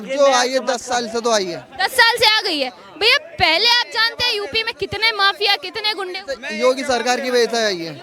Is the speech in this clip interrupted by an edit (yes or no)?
no